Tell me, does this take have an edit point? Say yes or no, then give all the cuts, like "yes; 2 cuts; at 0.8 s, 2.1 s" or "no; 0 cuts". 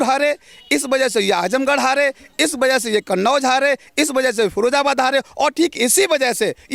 no; 0 cuts